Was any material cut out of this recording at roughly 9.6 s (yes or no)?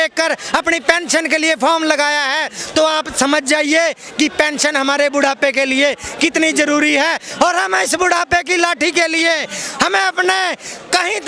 no